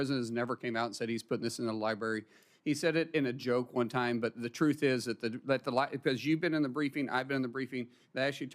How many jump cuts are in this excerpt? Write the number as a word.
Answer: zero